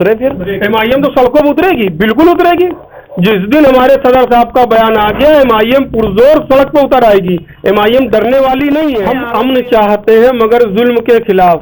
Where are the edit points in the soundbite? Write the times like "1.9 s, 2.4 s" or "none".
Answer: 9.1 s

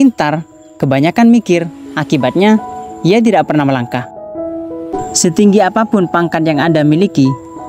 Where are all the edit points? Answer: 4.9 s

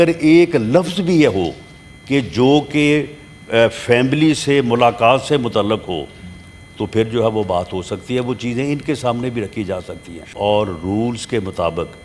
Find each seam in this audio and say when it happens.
10.3 s

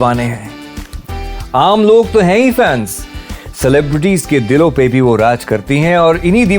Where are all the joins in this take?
none

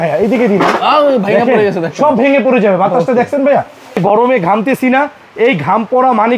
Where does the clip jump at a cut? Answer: 4.0 s

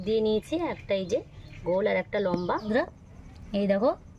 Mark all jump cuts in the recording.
2.7 s

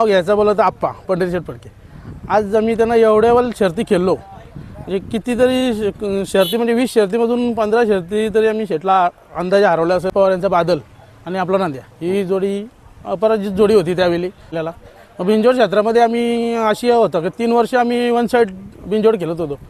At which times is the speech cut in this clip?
10.1 s, 14.6 s

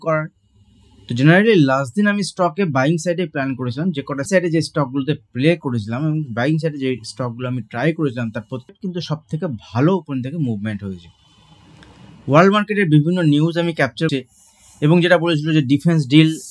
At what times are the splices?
4.3 s, 8.7 s, 14.1 s

